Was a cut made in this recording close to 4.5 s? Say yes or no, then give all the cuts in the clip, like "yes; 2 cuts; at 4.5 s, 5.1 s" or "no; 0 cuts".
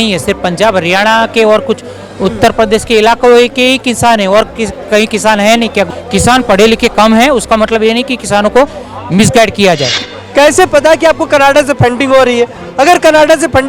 no; 2 cuts; at 5.9 s, 10.0 s